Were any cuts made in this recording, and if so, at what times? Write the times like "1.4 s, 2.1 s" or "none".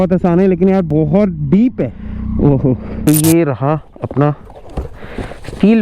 2.0 s, 3.1 s